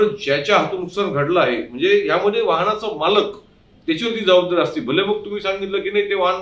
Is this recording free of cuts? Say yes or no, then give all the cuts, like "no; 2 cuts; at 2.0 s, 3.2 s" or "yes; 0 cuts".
yes; 0 cuts